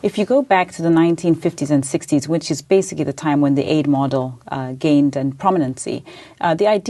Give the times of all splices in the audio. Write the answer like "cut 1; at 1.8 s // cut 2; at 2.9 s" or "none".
cut 1; at 2.0 s